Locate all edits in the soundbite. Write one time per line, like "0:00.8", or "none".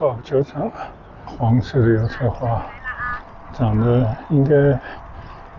0:01.2